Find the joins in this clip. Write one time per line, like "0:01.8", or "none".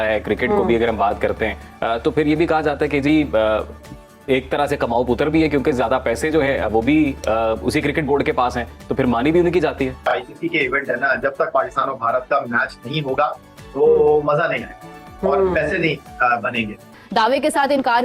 0:10.0
0:16.9